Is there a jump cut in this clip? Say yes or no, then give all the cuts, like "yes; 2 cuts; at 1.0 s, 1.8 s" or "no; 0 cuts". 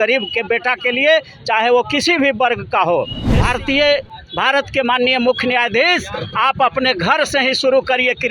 yes; 1 cut; at 3.2 s